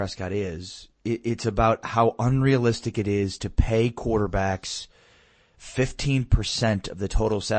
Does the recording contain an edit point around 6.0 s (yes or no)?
no